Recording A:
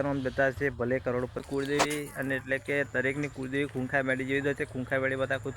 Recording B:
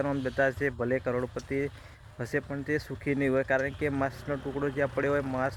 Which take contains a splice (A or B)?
A